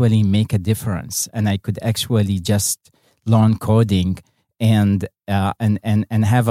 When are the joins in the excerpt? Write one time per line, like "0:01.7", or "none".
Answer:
none